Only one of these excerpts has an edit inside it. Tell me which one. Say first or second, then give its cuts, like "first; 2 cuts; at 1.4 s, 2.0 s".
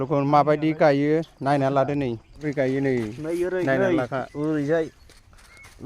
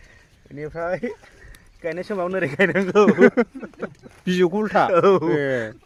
first; 1 cut; at 2.4 s